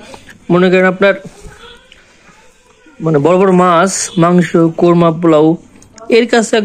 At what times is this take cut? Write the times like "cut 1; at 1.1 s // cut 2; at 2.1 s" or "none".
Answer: none

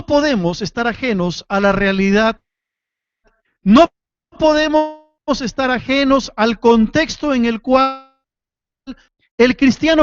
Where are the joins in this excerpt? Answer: cut 1; at 6.9 s

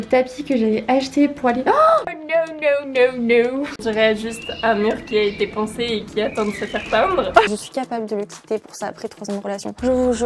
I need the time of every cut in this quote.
cut 1; at 3.8 s // cut 2; at 7.5 s

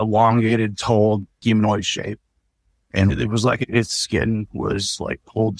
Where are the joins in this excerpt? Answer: cut 1; at 1.3 s

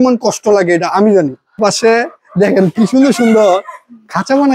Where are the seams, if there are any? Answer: cut 1; at 1.6 s

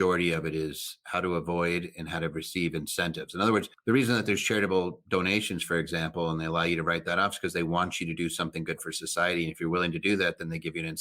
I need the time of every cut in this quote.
cut 1; at 1.0 s // cut 2; at 3.7 s

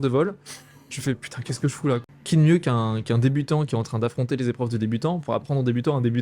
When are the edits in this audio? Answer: cut 1; at 2.1 s

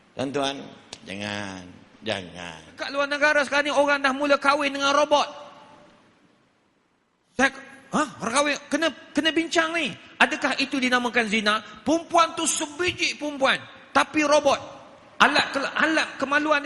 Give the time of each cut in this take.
cut 1; at 2.8 s

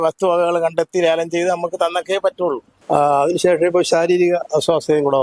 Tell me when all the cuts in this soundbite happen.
cut 1; at 2.7 s

